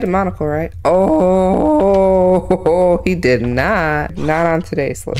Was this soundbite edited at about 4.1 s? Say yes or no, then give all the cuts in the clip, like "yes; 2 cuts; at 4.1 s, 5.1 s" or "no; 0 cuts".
yes; 1 cut; at 4.1 s